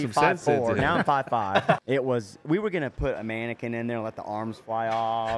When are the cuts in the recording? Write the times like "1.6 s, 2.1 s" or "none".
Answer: 1.8 s

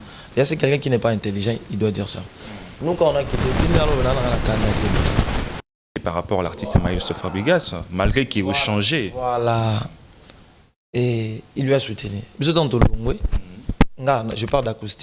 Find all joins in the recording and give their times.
none

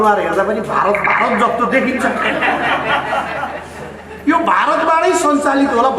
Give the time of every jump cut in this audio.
none

